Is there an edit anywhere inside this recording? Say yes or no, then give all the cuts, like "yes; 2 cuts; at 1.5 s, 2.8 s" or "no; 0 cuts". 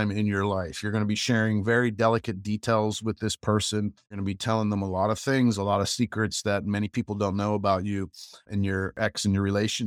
yes; 1 cut; at 4.1 s